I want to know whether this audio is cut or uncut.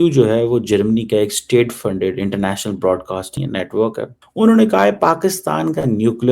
cut